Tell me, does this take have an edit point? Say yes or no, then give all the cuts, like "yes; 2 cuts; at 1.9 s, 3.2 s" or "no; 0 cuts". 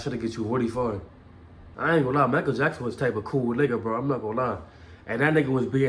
yes; 1 cut; at 1.7 s